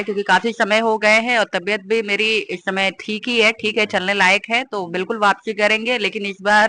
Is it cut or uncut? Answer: uncut